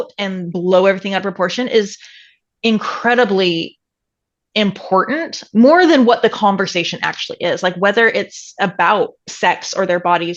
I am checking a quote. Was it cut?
no; 0 cuts

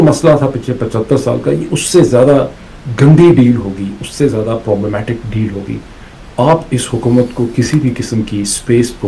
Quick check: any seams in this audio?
no; 0 cuts

